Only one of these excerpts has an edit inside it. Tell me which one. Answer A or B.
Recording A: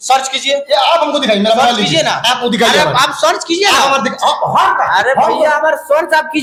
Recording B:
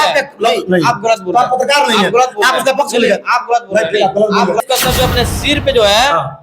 B